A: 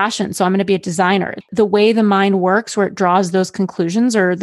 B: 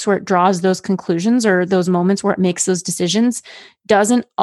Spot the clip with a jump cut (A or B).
A